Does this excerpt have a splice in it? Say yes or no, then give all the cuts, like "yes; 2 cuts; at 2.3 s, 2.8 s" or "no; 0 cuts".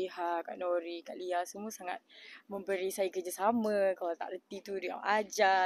no; 0 cuts